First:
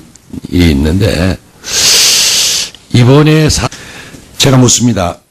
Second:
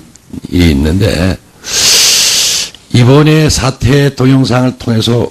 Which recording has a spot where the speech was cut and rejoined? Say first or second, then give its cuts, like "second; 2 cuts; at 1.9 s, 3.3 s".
second; 1 cut; at 3.7 s